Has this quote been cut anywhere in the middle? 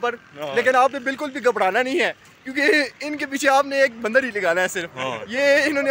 no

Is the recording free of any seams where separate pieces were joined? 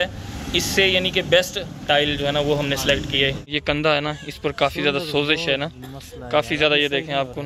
no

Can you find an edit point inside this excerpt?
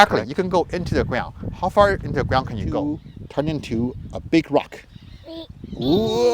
yes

